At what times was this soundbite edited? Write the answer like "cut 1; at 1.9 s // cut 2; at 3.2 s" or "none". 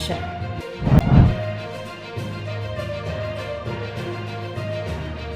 cut 1; at 1.0 s